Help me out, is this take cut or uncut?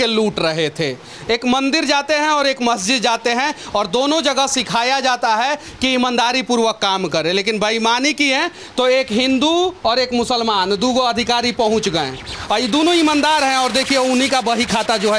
uncut